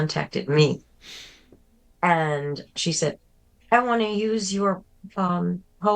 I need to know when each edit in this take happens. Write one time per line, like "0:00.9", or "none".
0:02.7